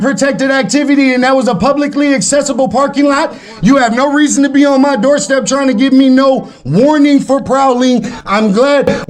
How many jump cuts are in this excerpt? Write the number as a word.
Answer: zero